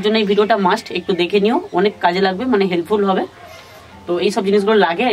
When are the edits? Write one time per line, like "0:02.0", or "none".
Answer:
none